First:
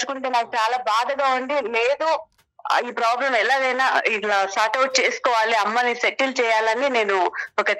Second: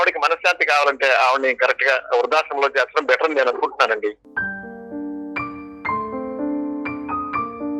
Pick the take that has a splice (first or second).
second